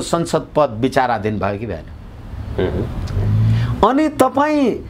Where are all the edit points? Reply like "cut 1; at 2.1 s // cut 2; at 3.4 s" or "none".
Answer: none